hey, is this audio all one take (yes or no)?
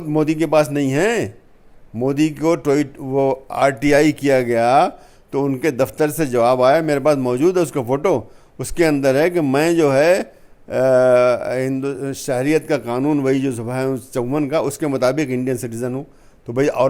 yes